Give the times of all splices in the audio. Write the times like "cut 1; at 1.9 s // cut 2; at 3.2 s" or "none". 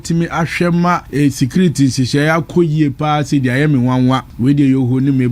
cut 1; at 1.1 s // cut 2; at 4.3 s

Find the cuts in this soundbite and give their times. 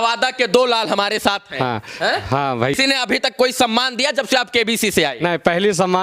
cut 1; at 2.7 s

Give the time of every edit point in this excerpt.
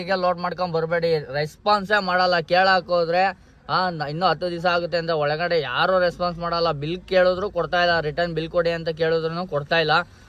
none

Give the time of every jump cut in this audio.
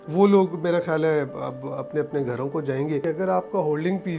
cut 1; at 3.0 s

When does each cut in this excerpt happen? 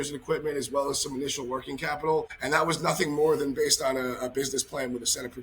cut 1; at 2.4 s

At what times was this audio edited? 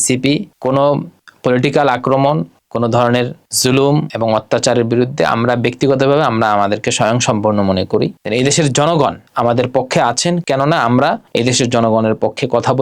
cut 1; at 8.2 s

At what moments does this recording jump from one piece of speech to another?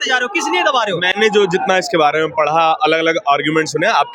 none

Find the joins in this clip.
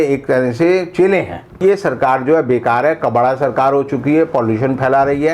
cut 1; at 1.6 s

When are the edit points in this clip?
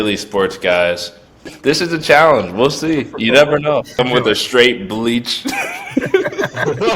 cut 1; at 1.5 s // cut 2; at 3.9 s

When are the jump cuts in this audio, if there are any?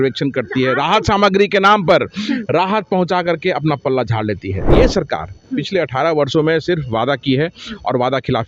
cut 1; at 4.7 s

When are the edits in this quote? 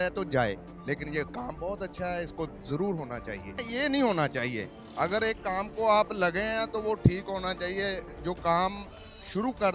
cut 1; at 3.6 s

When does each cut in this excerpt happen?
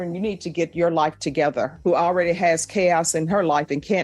cut 1; at 1.8 s

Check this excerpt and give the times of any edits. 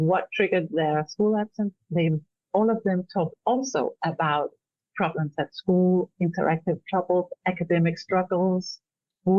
none

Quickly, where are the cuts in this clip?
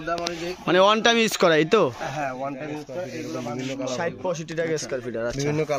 cut 1; at 3.5 s

